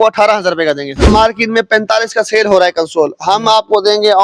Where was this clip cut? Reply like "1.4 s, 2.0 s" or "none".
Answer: 1.0 s

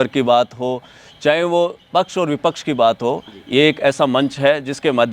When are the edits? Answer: none

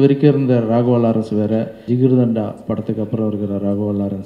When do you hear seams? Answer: 1.8 s

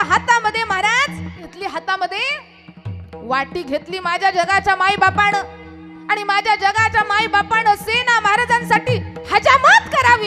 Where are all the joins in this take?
1.5 s

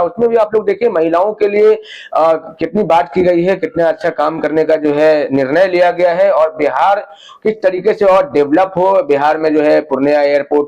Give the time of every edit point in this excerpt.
none

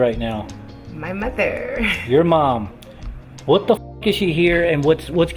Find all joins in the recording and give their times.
none

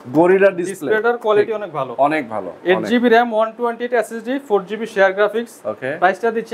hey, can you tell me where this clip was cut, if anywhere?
none

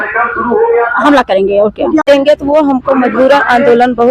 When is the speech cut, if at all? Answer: 2.0 s

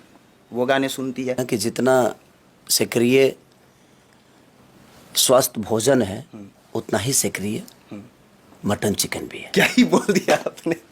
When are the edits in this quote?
1.4 s

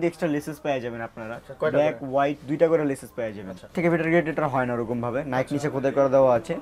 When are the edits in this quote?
3.7 s

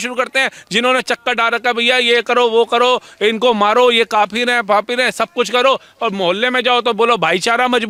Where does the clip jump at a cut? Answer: none

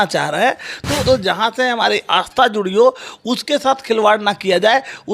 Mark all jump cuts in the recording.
1.0 s

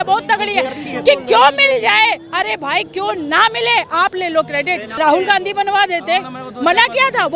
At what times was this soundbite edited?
4.9 s

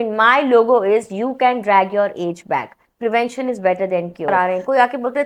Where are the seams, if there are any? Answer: 4.3 s

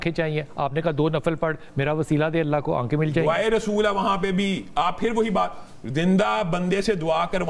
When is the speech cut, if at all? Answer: none

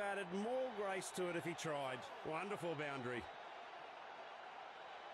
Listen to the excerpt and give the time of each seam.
3.2 s

